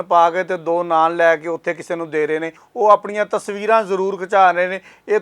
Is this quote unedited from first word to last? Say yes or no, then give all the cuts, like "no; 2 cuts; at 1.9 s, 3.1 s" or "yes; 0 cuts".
no; 1 cut; at 2.6 s